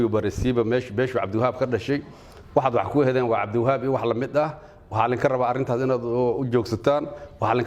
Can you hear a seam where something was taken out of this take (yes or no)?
no